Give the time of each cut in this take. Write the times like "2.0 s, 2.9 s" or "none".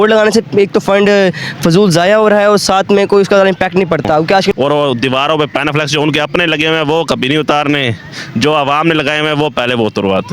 4.5 s